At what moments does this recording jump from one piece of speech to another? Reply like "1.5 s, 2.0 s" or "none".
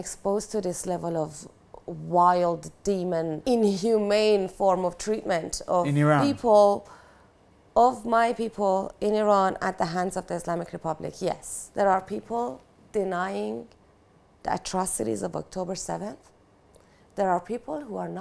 11.6 s